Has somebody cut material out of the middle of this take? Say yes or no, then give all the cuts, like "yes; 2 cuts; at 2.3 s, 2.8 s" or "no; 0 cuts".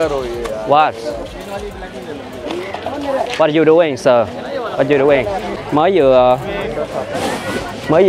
yes; 1 cut; at 5.5 s